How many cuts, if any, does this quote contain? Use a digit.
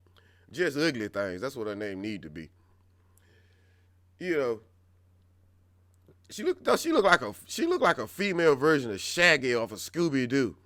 0